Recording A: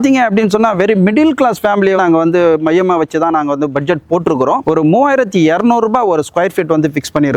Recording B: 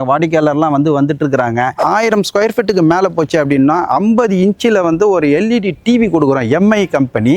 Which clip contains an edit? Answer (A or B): B